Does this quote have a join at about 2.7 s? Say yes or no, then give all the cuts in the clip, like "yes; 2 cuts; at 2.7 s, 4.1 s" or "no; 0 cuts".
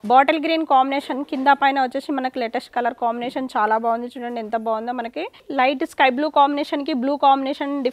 no; 1 cut; at 5.4 s